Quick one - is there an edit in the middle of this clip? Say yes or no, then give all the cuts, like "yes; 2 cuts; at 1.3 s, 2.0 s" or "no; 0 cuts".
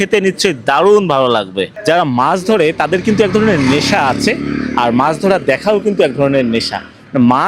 yes; 1 cut; at 1.7 s